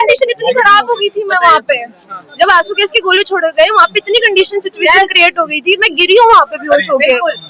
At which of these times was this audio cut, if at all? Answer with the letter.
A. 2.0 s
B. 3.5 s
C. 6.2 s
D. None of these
D